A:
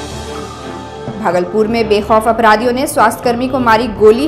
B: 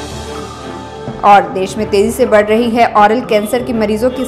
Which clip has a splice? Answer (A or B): A